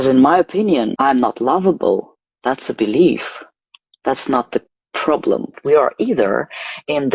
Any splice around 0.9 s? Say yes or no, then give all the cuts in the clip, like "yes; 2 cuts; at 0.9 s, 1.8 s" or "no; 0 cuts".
yes; 2 cuts; at 0.9 s, 5.6 s